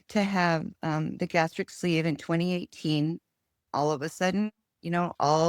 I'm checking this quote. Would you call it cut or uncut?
cut